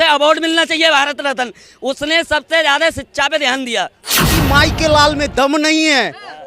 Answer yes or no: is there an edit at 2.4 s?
no